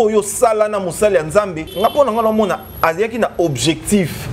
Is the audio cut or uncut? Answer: cut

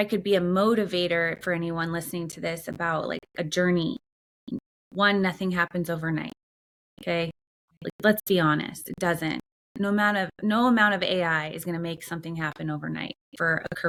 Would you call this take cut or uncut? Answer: uncut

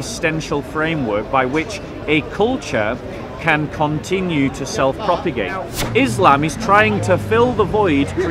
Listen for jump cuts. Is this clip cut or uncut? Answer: cut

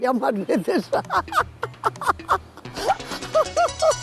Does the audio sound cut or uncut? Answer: uncut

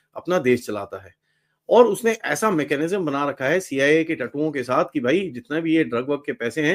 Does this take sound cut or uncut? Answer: uncut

